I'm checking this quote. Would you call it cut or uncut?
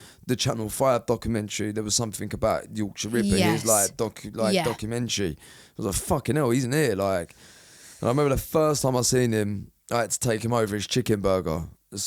uncut